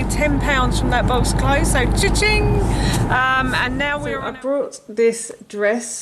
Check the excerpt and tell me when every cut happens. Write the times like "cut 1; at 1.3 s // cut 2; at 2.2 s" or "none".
cut 1; at 4.0 s